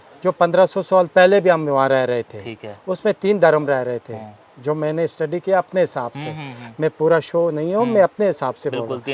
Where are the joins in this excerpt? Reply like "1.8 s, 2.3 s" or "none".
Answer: none